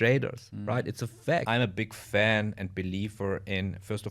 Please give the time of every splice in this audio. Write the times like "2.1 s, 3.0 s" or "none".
1.4 s